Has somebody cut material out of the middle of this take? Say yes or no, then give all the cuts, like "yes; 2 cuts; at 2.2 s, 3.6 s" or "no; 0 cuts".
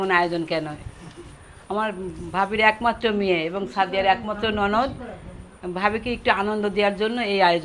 no; 0 cuts